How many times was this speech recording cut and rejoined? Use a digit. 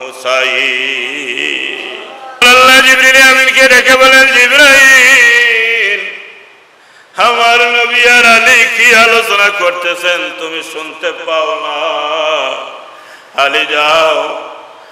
1